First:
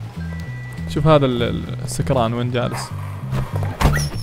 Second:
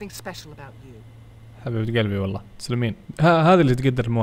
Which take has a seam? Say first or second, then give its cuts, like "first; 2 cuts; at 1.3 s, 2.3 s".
second; 1 cut; at 3.0 s